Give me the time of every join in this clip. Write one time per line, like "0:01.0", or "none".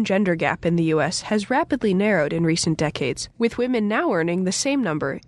none